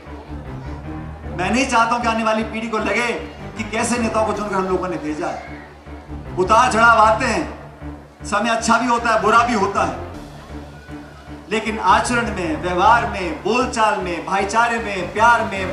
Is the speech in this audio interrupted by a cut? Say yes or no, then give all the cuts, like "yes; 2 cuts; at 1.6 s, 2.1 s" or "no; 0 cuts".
no; 0 cuts